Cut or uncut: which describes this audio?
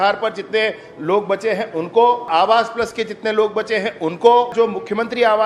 cut